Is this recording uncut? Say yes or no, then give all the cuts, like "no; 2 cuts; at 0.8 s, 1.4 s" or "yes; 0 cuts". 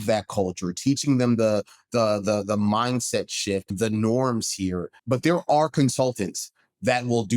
no; 2 cuts; at 3.7 s, 5.0 s